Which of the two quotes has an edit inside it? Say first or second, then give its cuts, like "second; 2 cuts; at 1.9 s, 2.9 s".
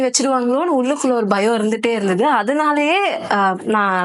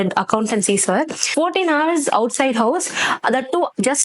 second; 1 cut; at 1.3 s